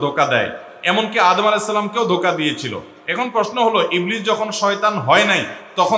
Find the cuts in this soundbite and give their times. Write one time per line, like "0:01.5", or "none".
none